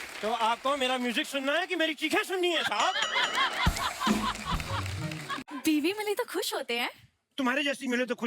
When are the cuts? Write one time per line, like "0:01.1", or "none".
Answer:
0:05.3

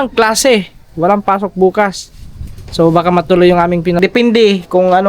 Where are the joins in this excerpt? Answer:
0:04.0

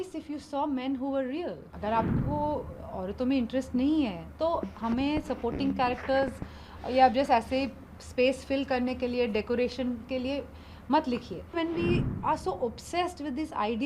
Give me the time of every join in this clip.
0:01.7
0:11.6

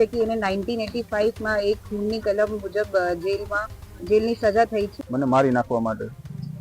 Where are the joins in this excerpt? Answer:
0:05.0

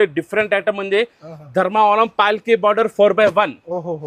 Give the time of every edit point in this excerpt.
none

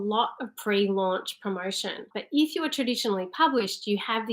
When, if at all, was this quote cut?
0:02.1

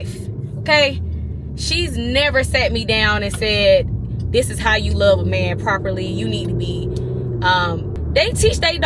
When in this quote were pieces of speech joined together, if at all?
none

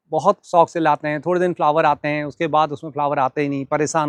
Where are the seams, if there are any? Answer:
none

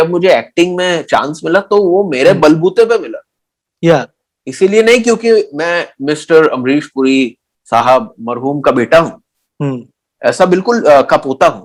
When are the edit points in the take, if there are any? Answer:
none

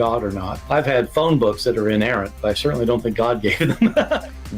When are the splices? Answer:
0:03.1

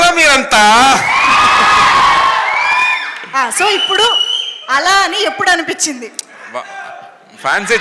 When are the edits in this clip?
none

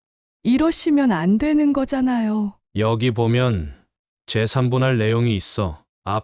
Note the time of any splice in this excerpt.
0:02.6

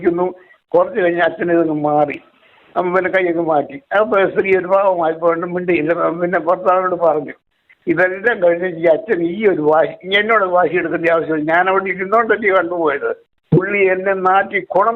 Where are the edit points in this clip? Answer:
0:13.3

